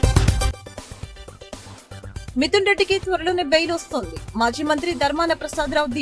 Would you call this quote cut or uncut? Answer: cut